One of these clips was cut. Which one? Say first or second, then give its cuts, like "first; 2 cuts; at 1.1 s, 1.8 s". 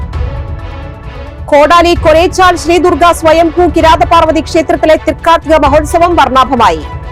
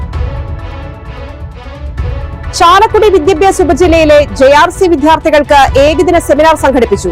first; 1 cut; at 1.0 s